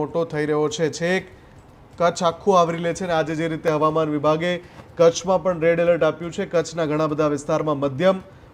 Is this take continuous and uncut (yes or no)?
yes